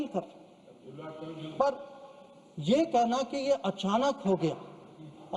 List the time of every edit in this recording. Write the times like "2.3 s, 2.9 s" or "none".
none